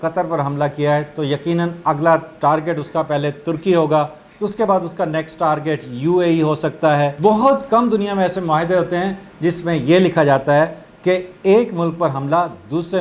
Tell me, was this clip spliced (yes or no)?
yes